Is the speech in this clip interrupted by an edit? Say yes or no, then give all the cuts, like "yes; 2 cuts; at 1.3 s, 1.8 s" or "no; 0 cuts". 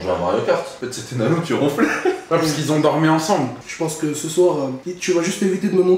yes; 3 cuts; at 2.2 s, 3.6 s, 4.8 s